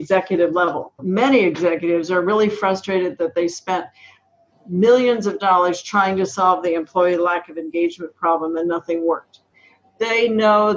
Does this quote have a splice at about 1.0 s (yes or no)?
yes